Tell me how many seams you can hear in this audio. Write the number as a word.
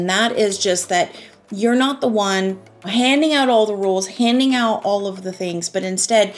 one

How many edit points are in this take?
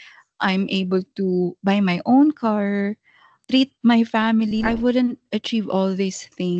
one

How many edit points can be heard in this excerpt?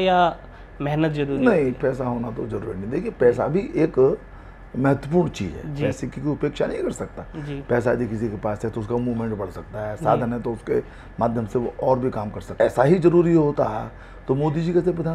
one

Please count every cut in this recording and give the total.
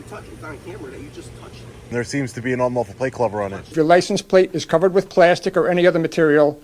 two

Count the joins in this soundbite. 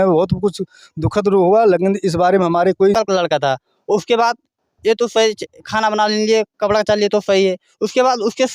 one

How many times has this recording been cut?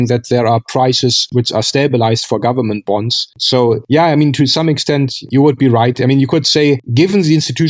zero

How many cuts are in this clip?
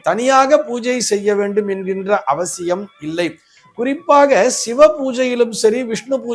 zero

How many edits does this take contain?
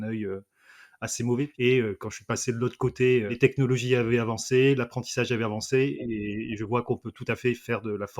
two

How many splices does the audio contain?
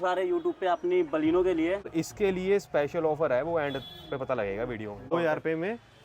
two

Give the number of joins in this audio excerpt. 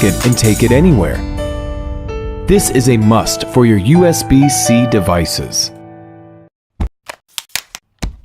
one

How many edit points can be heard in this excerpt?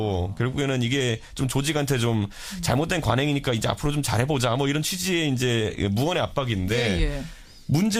one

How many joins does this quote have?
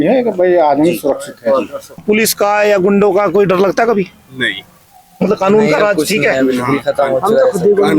one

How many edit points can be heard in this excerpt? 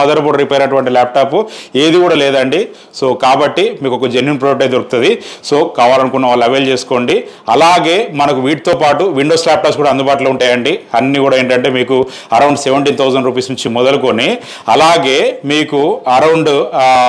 zero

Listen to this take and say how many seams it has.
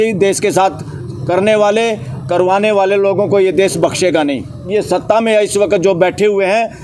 one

